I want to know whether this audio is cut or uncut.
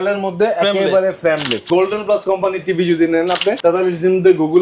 cut